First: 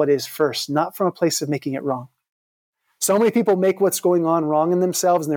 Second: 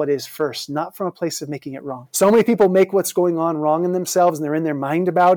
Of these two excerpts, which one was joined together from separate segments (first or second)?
second